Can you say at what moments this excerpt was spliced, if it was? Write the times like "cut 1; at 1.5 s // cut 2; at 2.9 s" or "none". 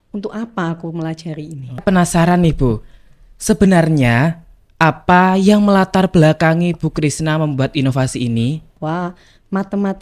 cut 1; at 1.8 s // cut 2; at 8.7 s

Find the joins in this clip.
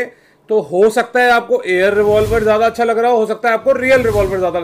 none

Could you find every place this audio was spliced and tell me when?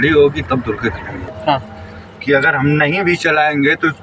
cut 1; at 1.3 s

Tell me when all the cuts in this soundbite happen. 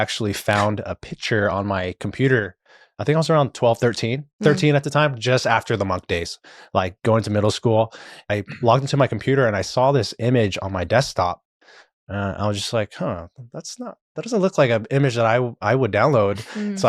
cut 1; at 8.2 s

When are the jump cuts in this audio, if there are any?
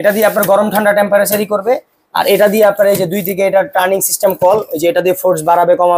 none

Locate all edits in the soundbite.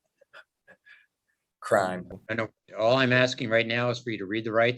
none

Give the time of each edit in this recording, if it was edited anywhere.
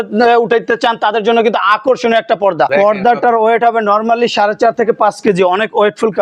cut 1; at 2.7 s

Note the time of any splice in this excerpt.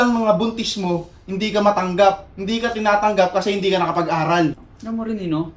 cut 1; at 4.5 s

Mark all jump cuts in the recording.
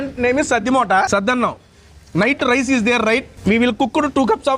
cut 1; at 1.1 s // cut 2; at 3.3 s

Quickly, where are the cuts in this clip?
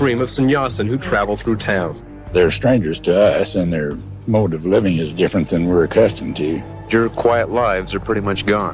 cut 1; at 2.1 s // cut 2; at 6.7 s

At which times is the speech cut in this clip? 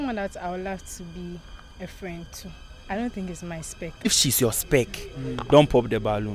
cut 1; at 2.6 s // cut 2; at 4.1 s

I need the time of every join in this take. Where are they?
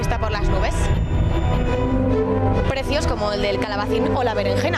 cut 1; at 3.6 s

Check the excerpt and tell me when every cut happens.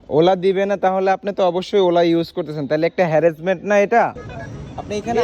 cut 1; at 4.2 s

